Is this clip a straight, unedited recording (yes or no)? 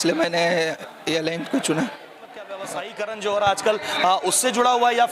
no